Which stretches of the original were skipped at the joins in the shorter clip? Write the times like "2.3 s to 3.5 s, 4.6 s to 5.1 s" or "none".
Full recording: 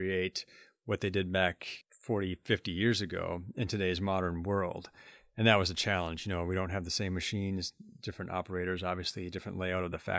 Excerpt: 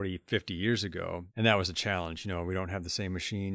3.4 s to 5.2 s